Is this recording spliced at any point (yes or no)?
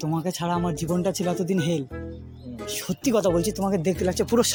no